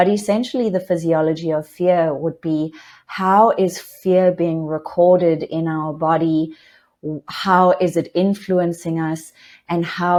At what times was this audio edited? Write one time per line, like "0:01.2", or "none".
none